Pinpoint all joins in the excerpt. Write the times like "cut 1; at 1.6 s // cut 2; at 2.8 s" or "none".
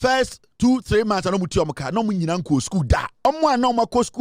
cut 1; at 3.2 s